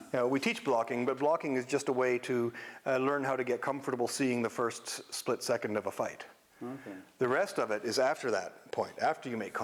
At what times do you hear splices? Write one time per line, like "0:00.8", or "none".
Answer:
none